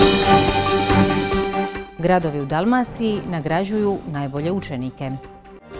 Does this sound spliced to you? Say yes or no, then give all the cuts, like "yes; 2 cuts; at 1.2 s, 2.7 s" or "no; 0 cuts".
no; 0 cuts